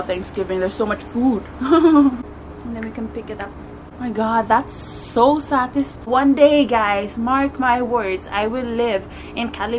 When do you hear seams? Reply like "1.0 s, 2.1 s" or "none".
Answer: 2.3 s, 3.9 s, 6.1 s